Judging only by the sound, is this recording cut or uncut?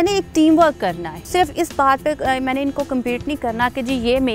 cut